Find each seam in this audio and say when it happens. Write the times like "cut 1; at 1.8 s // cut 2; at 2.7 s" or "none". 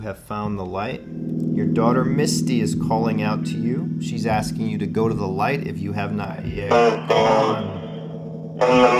cut 1; at 1.3 s